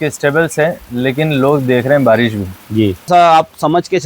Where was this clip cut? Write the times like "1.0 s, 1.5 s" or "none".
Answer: 3.1 s